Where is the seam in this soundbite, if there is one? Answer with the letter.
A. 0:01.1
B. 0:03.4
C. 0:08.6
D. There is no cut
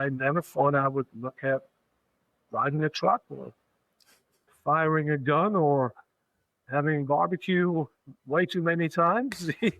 D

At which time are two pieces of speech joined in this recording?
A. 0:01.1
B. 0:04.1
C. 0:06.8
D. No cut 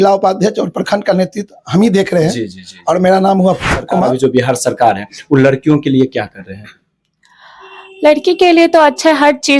B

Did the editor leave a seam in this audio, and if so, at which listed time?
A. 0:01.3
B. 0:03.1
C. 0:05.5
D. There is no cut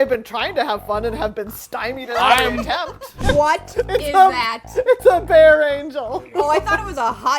B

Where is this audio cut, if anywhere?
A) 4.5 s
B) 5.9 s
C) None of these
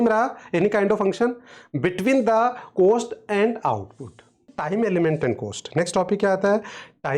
A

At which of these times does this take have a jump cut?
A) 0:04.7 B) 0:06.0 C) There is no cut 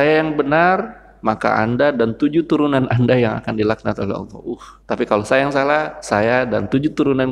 A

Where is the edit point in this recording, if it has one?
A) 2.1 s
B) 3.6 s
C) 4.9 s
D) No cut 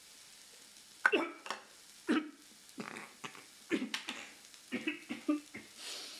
D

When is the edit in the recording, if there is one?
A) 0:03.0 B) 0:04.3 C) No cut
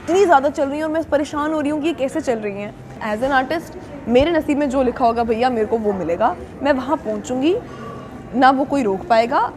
A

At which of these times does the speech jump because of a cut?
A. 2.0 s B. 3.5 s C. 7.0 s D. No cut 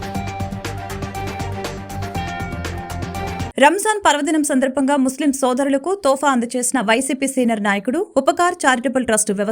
B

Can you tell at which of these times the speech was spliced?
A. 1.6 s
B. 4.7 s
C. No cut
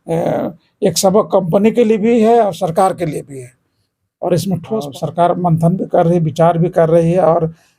B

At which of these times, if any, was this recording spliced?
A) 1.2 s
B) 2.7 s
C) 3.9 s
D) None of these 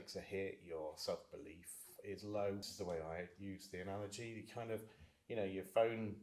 B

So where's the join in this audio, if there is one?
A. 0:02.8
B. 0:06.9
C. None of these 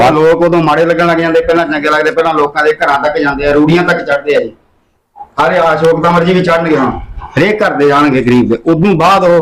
C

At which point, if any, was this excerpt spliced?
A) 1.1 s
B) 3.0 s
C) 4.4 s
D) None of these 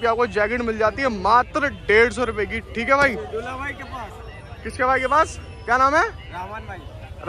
D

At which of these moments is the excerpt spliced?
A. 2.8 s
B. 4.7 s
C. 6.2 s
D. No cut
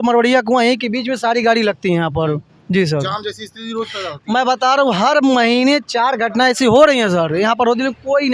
D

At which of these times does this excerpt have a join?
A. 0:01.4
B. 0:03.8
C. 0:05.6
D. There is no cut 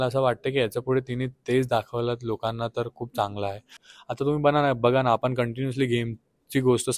B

